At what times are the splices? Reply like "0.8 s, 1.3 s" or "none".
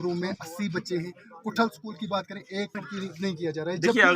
2.8 s